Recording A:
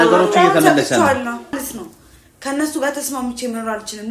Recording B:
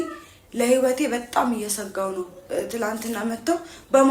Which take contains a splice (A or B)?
A